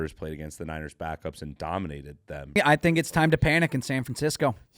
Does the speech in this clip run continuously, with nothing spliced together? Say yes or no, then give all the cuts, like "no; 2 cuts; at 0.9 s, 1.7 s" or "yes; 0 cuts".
no; 1 cut; at 2.6 s